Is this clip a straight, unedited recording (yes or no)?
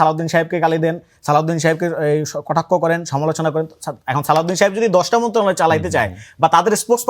yes